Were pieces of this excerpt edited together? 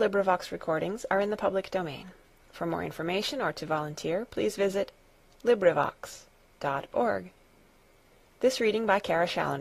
no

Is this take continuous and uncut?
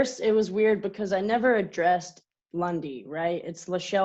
yes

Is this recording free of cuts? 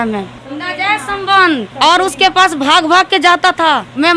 yes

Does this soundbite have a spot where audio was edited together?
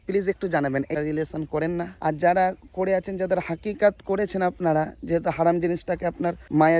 yes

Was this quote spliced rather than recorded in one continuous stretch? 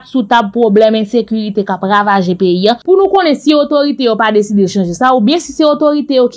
yes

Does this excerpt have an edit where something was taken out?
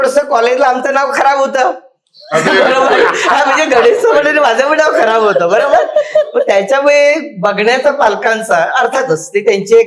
no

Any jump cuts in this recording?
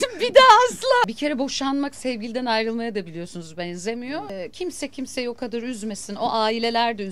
yes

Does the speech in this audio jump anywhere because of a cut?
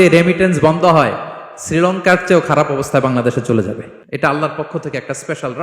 yes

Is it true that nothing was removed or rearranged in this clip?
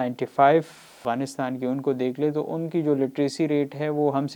no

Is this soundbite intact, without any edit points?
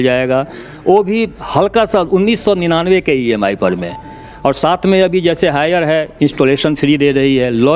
yes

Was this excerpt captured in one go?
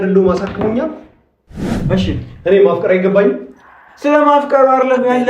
no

